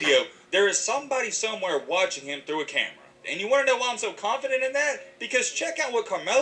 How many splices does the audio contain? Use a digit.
1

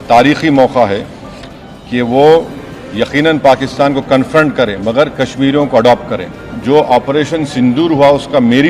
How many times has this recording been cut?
1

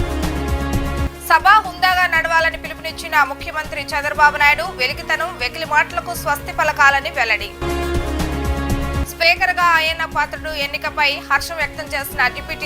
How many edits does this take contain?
1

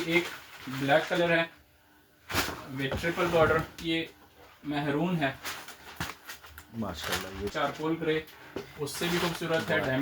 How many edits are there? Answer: 2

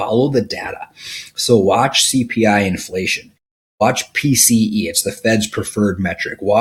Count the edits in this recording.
0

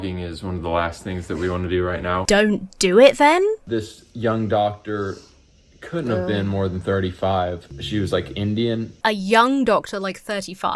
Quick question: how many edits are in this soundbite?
4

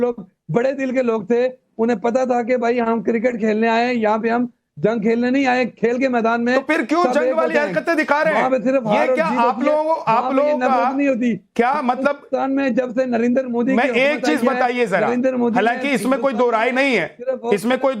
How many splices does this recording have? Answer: 1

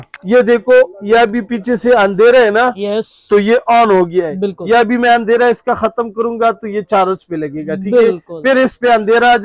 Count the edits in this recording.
0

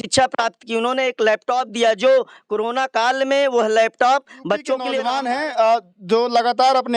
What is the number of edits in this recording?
1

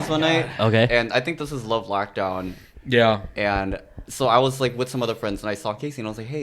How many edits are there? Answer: 0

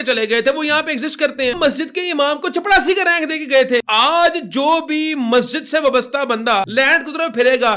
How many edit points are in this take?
3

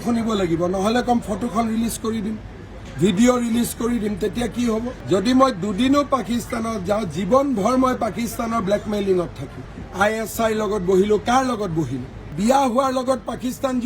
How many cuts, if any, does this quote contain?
3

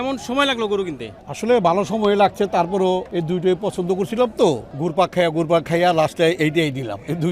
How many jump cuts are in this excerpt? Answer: 2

